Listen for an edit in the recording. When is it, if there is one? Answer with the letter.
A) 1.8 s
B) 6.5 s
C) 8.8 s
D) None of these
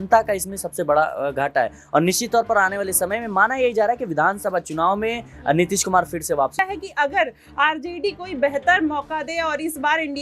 B